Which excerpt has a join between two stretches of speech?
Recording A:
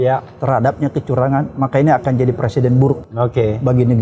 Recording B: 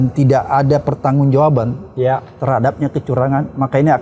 A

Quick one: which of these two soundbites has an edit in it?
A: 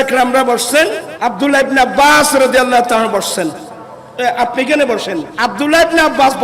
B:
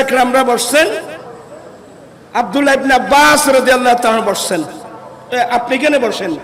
A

